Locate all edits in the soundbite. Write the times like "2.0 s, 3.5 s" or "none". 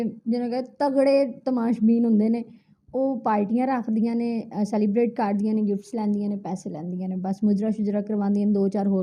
none